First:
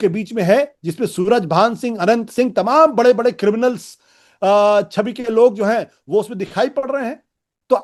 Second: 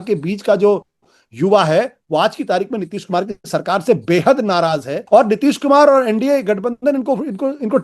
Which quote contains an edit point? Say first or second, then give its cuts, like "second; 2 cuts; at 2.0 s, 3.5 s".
second; 1 cut; at 4.9 s